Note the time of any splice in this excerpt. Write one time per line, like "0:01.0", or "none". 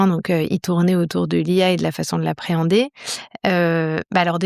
none